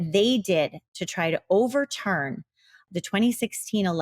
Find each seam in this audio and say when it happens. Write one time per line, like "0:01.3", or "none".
0:02.8